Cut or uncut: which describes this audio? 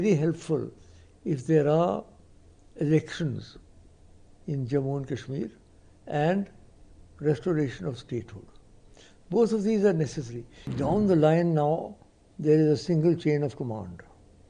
cut